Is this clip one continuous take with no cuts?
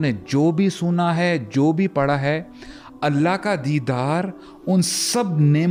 yes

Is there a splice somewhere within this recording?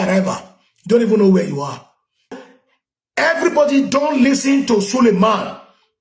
yes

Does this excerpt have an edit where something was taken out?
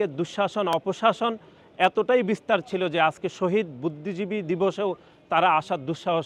no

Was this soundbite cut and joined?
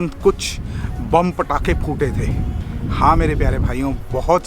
no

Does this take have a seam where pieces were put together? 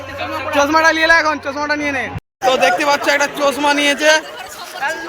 yes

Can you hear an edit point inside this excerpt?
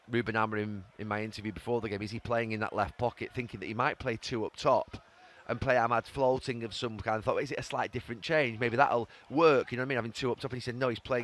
no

